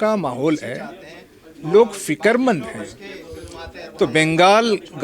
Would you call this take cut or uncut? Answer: uncut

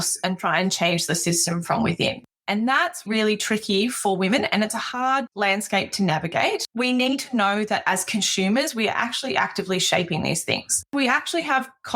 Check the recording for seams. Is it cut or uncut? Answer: cut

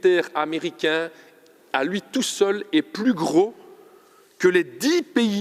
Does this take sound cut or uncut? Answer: uncut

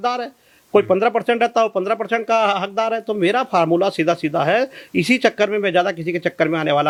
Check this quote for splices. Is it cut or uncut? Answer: uncut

